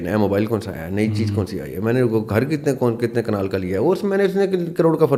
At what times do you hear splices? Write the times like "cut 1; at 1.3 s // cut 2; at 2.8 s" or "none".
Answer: none